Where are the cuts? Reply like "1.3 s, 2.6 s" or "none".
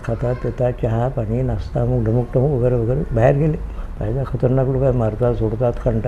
none